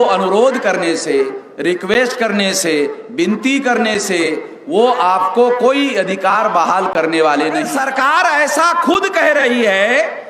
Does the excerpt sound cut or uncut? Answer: cut